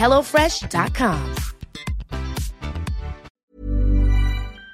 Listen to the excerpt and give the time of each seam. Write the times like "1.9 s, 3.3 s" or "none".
3.3 s